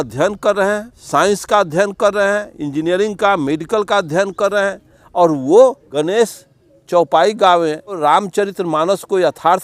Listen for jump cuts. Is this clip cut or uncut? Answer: cut